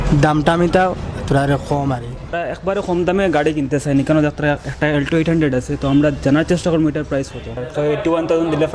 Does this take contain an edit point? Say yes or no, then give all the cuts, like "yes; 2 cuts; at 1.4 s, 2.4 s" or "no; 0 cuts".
yes; 2 cuts; at 2.4 s, 7.7 s